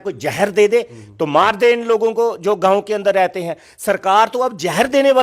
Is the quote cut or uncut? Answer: uncut